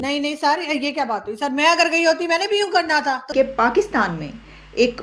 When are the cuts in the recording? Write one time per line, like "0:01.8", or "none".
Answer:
0:03.3